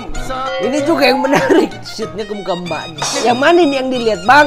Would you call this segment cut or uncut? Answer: cut